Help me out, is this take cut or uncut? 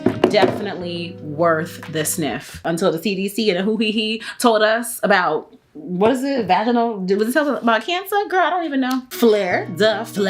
cut